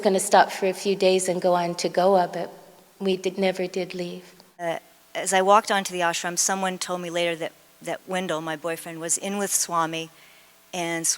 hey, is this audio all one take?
no; 1 cut; at 4.6 s

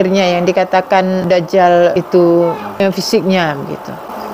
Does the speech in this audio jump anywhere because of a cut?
yes; 2 cuts; at 2.0 s, 2.8 s

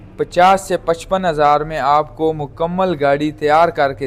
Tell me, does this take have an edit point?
no; 0 cuts

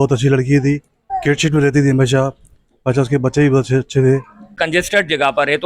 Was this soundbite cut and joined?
yes; 2 cuts; at 1.0 s, 4.6 s

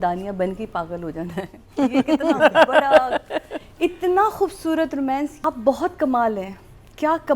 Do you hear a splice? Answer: yes; 1 cut; at 5.4 s

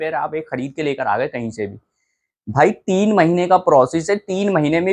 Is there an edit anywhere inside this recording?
no; 0 cuts

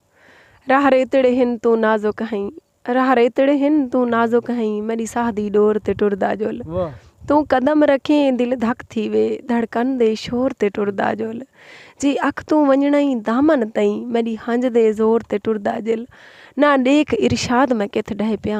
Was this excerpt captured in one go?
yes; 0 cuts

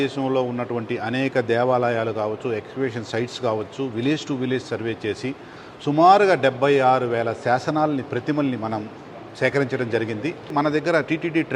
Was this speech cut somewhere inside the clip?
yes; 1 cut; at 10.5 s

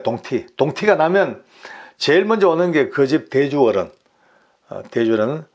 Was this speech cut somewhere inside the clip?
no; 0 cuts

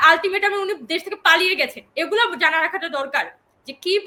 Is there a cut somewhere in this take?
no; 0 cuts

